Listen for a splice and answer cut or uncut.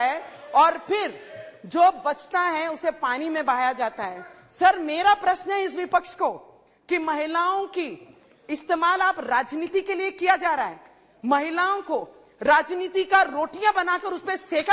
uncut